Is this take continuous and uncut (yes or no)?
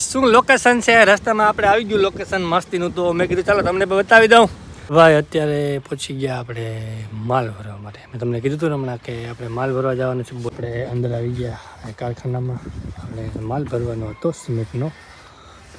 no